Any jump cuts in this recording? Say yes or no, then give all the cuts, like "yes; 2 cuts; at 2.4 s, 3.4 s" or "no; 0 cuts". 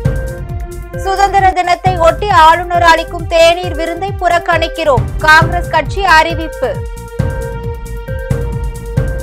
yes; 1 cut; at 1.0 s